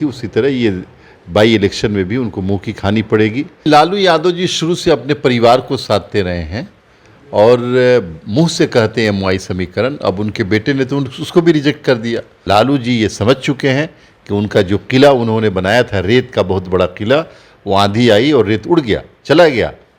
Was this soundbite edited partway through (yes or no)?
yes